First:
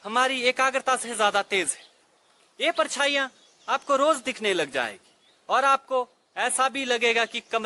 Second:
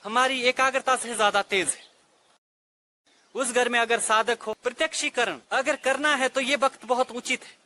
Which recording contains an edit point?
second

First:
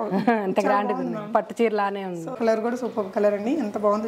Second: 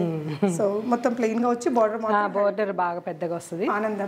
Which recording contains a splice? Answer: first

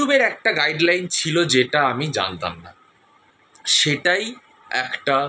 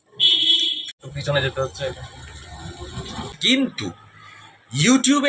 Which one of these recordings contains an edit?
second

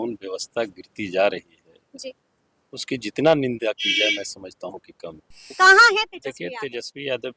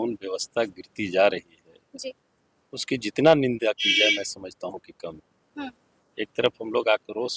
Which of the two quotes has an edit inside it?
first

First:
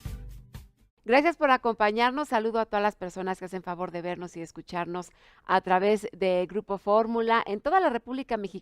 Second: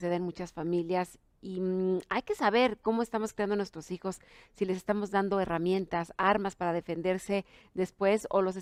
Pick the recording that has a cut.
first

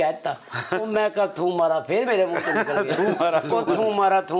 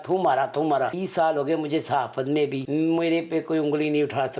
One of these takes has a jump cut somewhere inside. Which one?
second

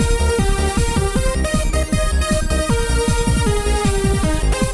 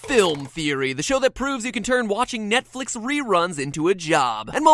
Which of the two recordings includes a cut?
first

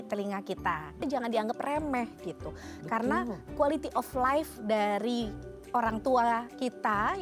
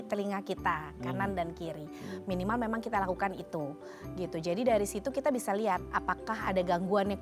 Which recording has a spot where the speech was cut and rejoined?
first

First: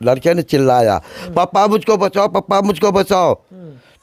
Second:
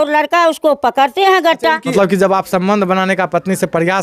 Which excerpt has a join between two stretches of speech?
second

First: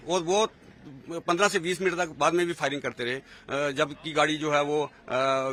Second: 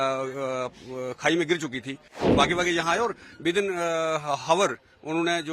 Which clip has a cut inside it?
second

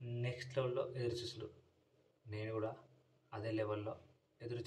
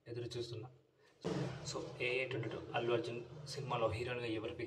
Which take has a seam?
second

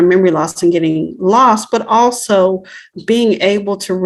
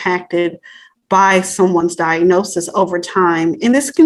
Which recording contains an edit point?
first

